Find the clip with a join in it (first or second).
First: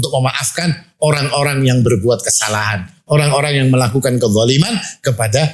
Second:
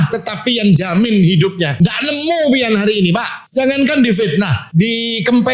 second